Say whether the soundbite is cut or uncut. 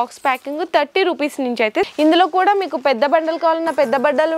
cut